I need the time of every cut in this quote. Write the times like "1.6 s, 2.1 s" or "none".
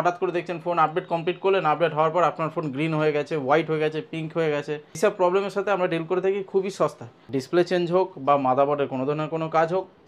5.0 s, 7.1 s